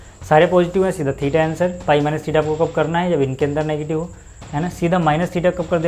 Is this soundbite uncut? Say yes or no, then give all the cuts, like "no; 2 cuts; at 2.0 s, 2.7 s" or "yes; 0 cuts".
yes; 0 cuts